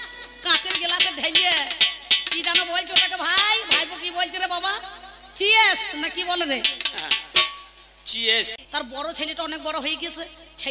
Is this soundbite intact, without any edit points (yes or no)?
no